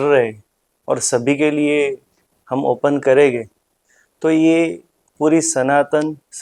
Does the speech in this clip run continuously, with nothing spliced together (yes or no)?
yes